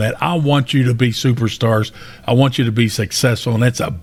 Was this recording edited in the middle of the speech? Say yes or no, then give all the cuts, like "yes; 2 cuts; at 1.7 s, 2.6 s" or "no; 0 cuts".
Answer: no; 0 cuts